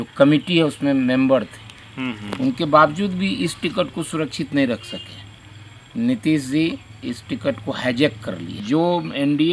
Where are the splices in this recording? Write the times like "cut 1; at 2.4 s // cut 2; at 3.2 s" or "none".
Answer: cut 1; at 8.6 s